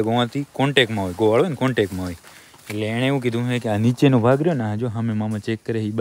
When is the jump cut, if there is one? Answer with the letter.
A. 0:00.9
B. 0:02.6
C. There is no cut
C